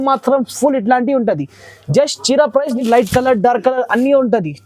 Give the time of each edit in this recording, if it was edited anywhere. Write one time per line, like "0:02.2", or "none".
0:02.8